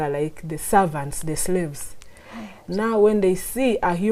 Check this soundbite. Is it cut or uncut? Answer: uncut